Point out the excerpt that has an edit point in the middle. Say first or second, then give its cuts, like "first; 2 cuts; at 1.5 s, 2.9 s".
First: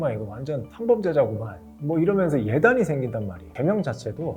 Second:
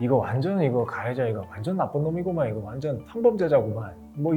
first; 1 cut; at 3.4 s